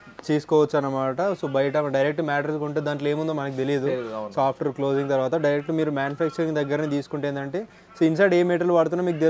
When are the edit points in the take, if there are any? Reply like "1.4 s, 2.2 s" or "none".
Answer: none